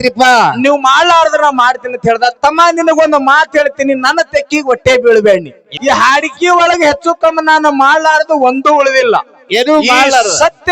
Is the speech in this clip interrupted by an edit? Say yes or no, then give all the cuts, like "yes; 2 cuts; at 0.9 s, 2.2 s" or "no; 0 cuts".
yes; 1 cut; at 5.8 s